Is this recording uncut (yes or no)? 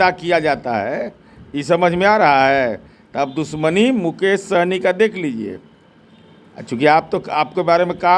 yes